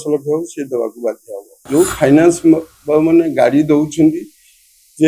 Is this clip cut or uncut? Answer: cut